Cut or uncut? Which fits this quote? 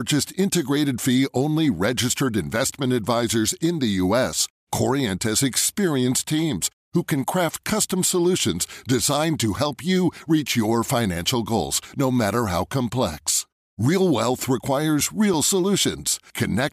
uncut